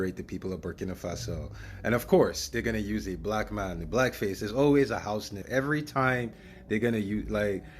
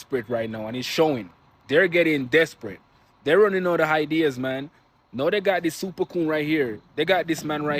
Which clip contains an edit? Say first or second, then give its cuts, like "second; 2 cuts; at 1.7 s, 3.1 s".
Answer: first; 1 cut; at 5.4 s